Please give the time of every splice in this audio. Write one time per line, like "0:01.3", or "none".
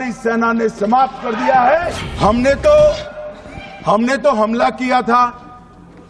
0:02.0